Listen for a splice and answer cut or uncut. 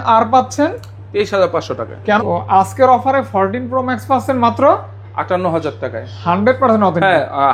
cut